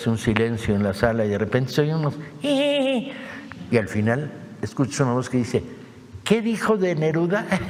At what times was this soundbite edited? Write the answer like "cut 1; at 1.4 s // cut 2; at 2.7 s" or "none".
none